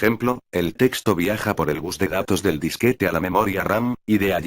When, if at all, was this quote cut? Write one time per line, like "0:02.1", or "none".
0:03.1